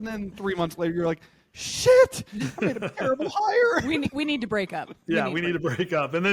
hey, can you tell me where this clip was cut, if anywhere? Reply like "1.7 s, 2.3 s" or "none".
none